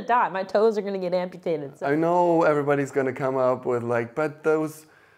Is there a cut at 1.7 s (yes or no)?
yes